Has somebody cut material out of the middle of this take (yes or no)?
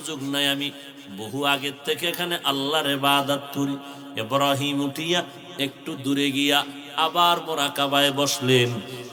no